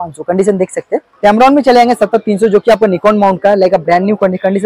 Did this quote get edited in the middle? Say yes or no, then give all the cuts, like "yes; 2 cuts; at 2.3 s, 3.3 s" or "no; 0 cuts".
yes; 1 cut; at 1.1 s